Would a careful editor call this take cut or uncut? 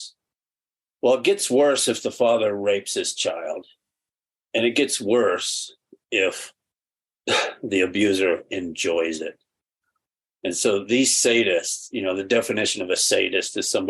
uncut